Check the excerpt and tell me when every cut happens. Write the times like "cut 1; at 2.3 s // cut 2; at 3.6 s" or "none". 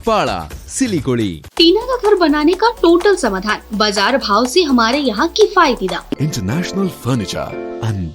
cut 1; at 1.4 s // cut 2; at 6.2 s